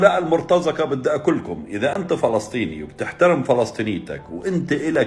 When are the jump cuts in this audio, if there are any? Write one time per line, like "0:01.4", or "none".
none